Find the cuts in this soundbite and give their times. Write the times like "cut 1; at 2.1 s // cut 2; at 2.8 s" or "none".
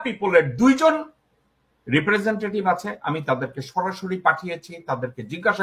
none